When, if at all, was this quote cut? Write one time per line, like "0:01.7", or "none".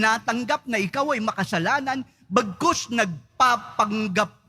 none